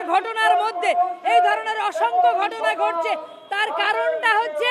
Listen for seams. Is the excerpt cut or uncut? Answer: uncut